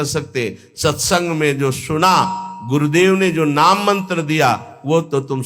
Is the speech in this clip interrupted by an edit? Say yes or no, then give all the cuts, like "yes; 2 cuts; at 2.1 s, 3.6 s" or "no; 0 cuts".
no; 0 cuts